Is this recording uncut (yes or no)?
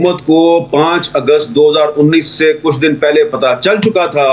yes